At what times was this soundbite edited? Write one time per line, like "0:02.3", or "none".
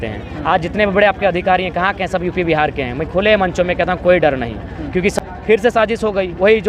0:05.1